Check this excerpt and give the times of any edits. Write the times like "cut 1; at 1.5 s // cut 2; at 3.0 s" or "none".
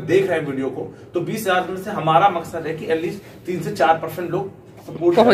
none